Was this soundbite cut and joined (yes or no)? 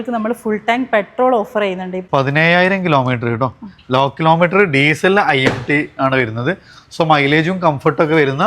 yes